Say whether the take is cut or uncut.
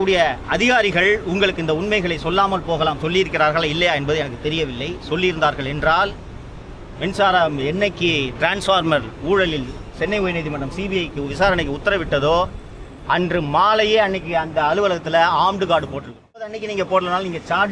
cut